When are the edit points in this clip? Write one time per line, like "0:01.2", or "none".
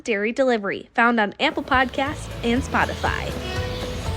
0:03.3